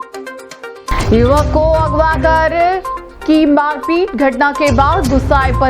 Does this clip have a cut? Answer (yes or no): yes